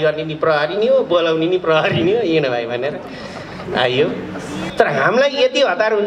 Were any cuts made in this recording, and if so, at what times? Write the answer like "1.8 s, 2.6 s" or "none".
4.7 s